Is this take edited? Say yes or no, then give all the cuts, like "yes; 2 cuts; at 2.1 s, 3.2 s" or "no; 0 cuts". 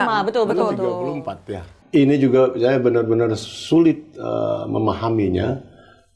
yes; 1 cut; at 1.7 s